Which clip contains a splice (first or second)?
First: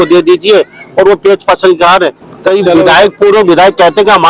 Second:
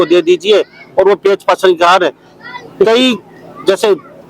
first